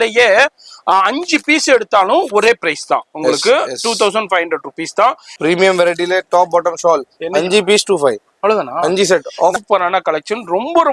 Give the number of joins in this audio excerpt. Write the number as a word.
two